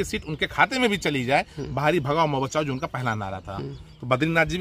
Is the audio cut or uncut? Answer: uncut